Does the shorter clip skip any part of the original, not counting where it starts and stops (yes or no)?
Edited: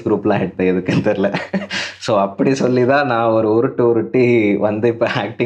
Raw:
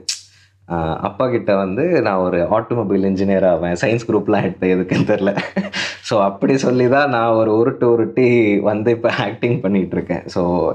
no